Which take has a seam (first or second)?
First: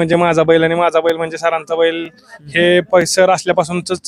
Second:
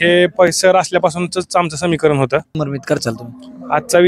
second